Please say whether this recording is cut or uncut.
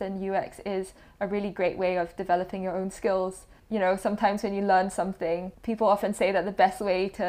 cut